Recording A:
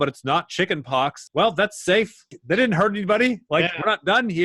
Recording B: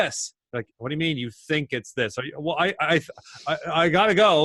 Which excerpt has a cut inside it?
A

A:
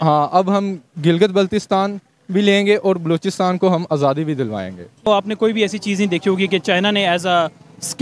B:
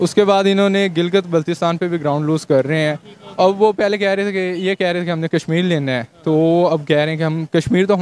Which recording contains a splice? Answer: A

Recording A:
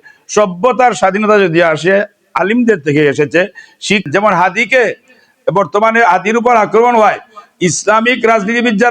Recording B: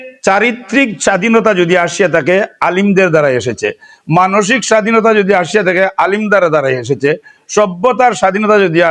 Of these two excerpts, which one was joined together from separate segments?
A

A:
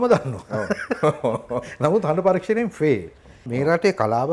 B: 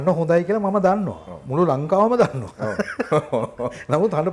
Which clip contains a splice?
A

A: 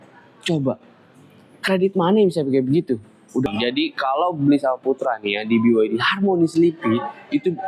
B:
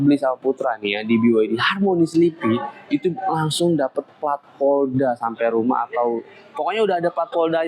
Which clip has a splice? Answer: A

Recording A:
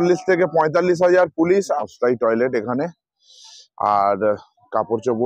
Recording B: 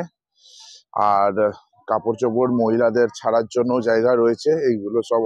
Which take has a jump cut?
A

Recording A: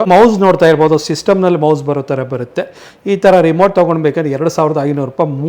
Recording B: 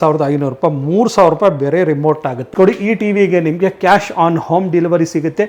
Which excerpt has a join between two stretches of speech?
B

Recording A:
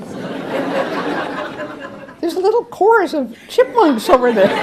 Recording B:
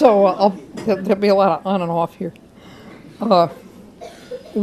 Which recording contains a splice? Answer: B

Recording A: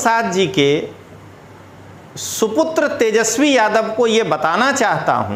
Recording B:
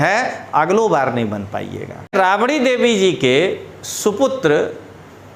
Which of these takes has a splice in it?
B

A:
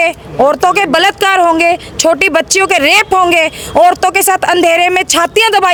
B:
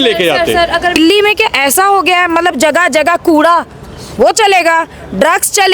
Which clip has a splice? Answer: B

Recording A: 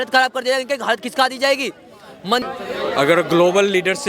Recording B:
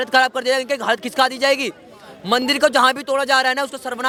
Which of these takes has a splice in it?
A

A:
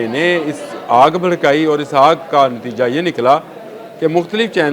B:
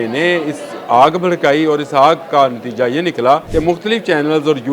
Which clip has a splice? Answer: B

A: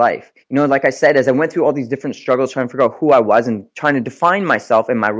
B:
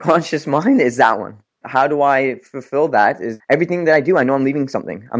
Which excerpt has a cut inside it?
B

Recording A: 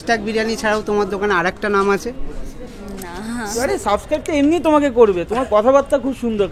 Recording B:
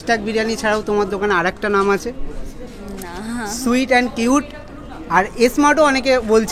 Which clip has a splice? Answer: A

